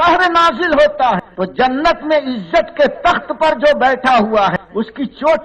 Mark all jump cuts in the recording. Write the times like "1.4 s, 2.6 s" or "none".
1.3 s, 4.6 s